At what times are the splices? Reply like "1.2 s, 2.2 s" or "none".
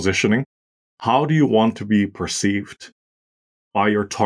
0.9 s